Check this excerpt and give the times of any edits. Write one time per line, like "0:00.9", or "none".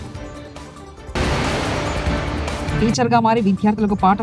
0:01.1
0:02.7